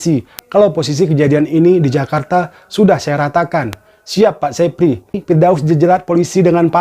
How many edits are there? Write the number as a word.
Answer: one